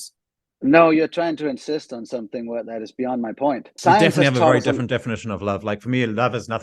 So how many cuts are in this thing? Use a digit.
1